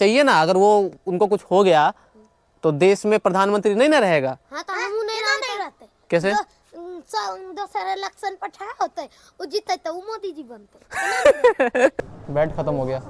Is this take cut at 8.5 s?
no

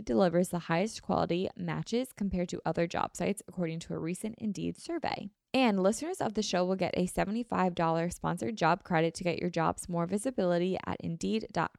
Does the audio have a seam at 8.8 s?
no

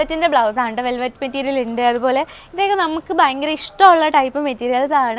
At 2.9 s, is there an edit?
no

